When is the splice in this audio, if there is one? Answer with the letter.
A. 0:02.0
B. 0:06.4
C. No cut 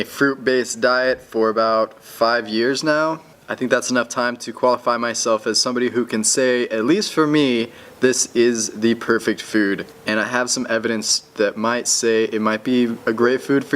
B